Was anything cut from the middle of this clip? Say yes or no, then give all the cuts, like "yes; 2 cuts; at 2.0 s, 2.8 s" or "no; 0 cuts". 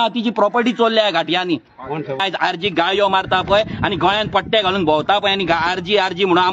yes; 1 cut; at 2.2 s